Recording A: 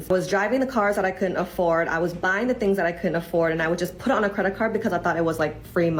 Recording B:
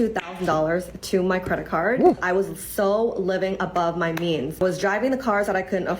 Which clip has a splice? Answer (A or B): B